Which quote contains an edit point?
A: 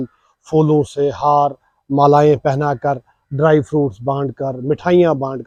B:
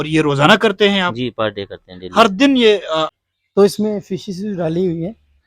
B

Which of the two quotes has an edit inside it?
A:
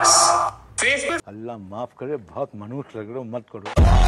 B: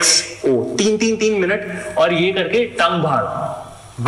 A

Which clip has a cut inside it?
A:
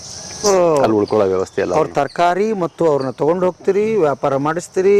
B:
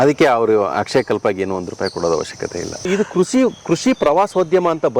B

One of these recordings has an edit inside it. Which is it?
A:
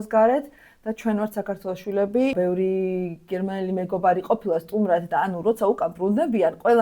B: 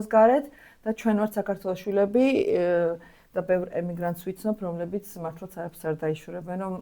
A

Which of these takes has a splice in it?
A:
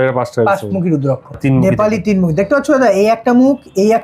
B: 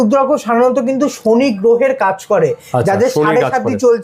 A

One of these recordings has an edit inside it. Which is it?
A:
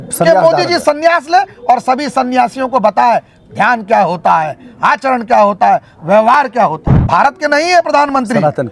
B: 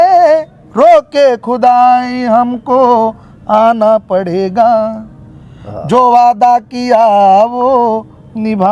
A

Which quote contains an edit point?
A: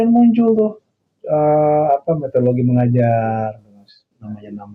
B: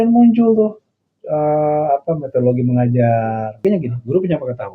B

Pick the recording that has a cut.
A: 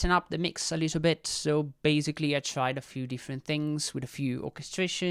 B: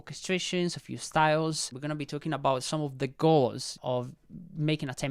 B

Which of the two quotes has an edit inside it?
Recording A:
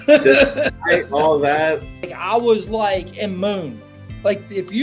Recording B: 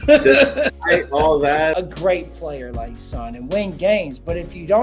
B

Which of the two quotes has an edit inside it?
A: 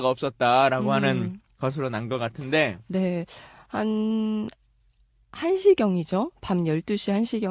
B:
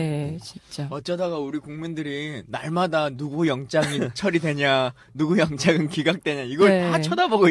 A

